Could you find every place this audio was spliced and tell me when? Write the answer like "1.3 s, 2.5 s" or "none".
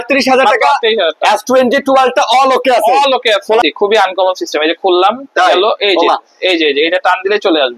3.6 s

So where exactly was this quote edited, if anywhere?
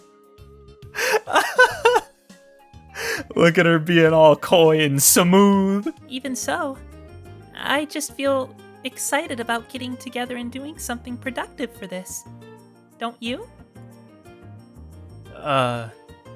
6.0 s

